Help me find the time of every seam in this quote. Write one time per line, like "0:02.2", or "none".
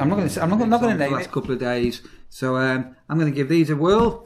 0:01.1